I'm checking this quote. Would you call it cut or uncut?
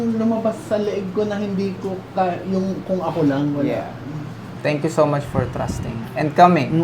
cut